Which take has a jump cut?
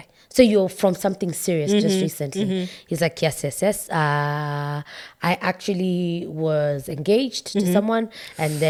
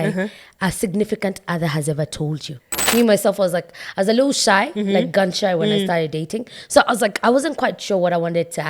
second; 1 cut; at 2.8 s

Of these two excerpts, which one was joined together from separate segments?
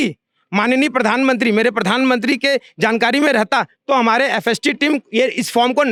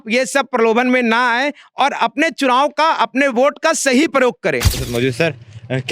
second; 1 cut; at 4.8 s

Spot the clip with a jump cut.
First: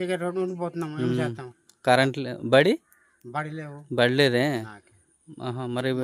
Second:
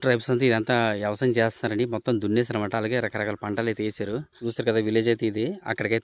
second; 1 cut; at 4.3 s

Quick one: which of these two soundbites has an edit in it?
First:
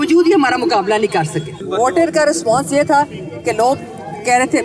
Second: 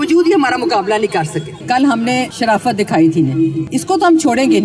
second; 2 cuts; at 1.6 s, 3.6 s

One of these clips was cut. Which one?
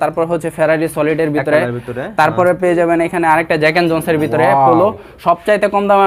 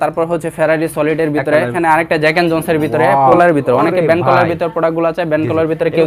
second; 2 cuts; at 1.7 s, 3.3 s

